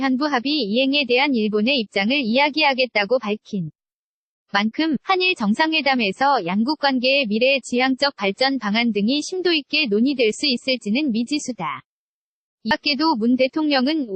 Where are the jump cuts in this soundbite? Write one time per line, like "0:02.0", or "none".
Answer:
0:12.7